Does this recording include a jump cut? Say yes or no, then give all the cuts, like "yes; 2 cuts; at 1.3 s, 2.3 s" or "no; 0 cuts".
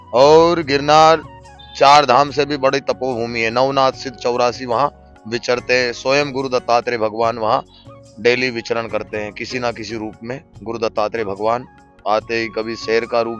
no; 0 cuts